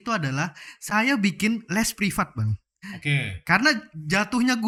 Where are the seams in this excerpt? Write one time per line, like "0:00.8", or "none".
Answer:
none